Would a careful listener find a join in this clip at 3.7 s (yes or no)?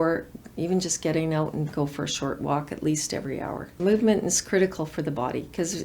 yes